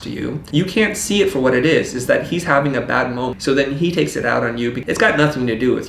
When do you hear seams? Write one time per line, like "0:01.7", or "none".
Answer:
0:03.3
0:04.8